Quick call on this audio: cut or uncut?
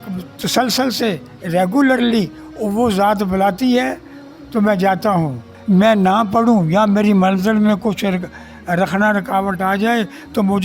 cut